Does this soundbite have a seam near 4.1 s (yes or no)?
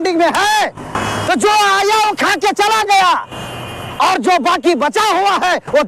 no